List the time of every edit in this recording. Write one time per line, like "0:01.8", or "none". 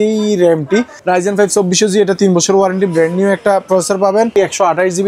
0:00.9
0:04.3